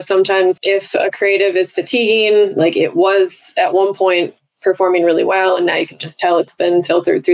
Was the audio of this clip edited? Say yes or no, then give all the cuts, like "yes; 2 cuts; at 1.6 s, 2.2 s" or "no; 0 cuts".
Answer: no; 0 cuts